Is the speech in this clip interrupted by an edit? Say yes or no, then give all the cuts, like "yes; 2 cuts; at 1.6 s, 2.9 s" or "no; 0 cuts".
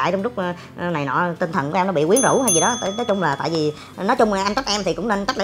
no; 0 cuts